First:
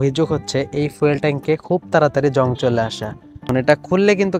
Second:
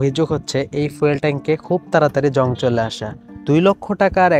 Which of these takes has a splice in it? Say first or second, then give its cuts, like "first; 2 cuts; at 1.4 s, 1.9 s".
first; 1 cut; at 3.4 s